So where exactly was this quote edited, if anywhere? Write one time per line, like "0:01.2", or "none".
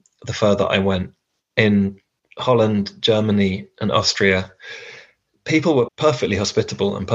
0:05.9